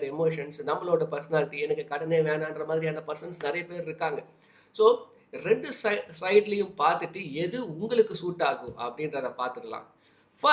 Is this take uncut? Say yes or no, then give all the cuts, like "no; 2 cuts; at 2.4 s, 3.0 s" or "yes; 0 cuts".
yes; 0 cuts